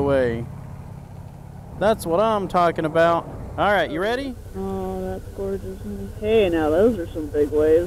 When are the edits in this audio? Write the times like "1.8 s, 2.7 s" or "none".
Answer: 4.4 s

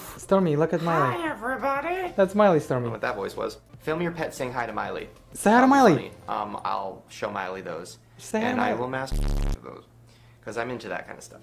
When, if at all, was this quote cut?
3.7 s

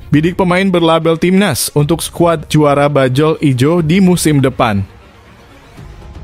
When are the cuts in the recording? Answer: 5.3 s

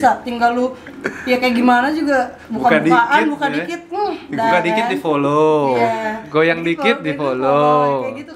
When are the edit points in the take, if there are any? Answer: none

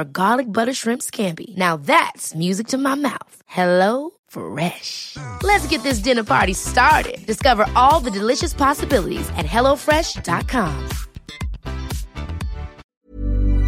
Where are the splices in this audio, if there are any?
12.8 s

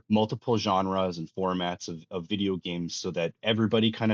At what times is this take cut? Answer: none

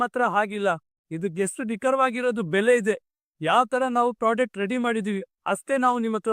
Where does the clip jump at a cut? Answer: none

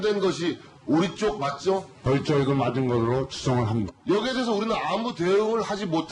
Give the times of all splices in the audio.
3.3 s

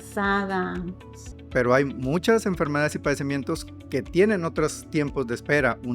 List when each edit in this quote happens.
1.4 s

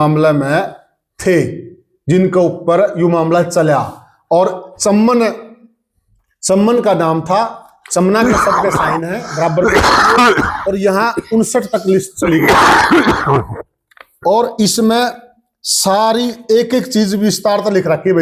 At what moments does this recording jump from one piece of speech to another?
none

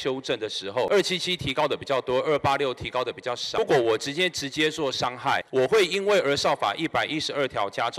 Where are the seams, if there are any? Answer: 0.9 s, 3.6 s, 5.4 s

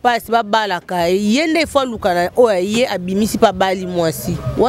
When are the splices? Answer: none

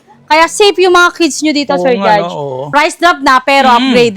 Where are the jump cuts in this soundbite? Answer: 2.6 s

